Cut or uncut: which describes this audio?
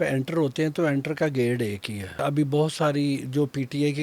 cut